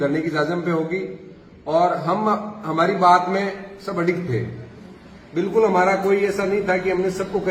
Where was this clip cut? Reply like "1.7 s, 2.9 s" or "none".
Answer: none